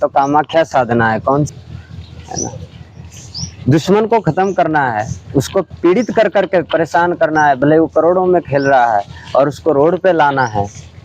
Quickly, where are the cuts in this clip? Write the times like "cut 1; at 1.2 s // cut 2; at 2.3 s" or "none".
cut 1; at 1.5 s